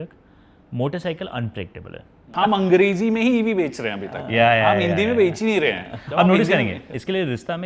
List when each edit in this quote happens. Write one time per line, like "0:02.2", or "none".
0:02.3